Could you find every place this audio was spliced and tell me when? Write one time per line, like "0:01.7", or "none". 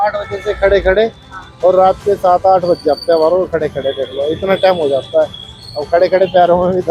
none